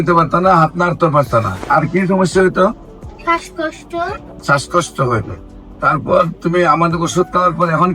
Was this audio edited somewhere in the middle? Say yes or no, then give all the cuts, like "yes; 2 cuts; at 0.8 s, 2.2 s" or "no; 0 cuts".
yes; 2 cuts; at 1.6 s, 4.3 s